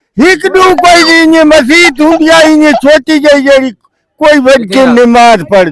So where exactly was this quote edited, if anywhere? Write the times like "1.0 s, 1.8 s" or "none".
none